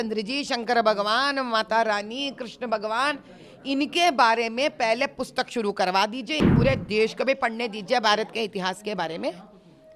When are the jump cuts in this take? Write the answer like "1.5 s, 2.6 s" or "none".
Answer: 6.5 s